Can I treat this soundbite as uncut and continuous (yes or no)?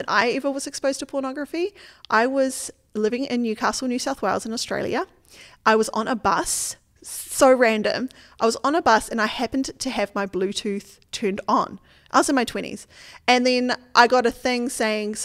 yes